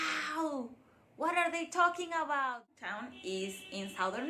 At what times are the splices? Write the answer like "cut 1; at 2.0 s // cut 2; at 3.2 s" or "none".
cut 1; at 2.7 s